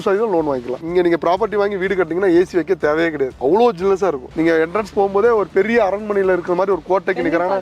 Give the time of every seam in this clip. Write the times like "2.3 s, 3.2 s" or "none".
0.8 s, 4.3 s